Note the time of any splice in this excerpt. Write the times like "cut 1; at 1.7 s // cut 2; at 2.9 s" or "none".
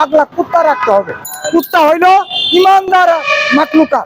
none